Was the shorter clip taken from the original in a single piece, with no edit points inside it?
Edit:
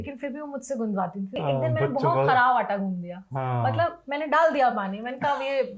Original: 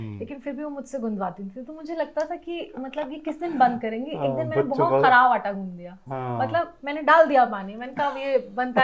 no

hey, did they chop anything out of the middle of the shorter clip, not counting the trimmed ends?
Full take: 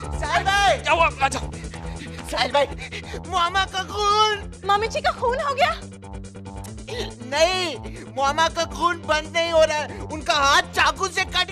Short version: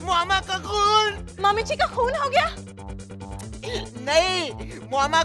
no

